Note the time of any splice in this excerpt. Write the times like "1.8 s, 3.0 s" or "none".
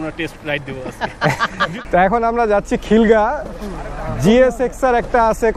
1.7 s